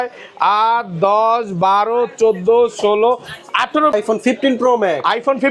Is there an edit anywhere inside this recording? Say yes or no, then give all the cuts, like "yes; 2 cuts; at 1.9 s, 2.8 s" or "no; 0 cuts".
yes; 1 cut; at 3.9 s